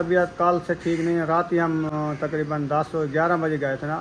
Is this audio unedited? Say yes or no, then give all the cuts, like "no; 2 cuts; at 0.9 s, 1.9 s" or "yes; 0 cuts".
yes; 0 cuts